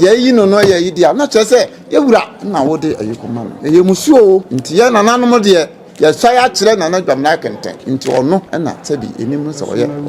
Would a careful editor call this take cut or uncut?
cut